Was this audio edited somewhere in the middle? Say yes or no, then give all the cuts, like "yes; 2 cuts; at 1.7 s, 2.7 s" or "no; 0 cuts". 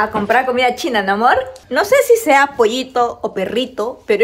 yes; 1 cut; at 1.6 s